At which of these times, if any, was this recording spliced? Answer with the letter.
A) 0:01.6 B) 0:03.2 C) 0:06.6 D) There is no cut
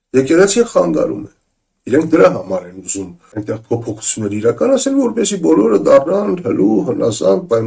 B